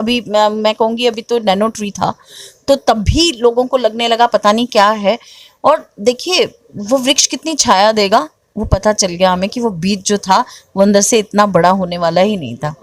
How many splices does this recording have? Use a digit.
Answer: 0